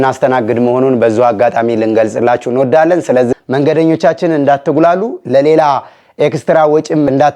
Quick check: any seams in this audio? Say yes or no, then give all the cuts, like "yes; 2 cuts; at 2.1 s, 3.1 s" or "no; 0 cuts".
yes; 1 cut; at 3.3 s